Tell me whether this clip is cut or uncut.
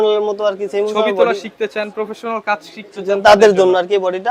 uncut